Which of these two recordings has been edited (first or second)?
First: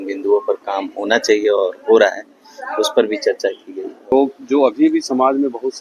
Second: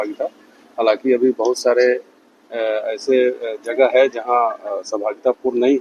first